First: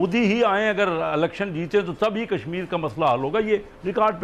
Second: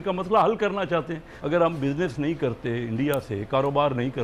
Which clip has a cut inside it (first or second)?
second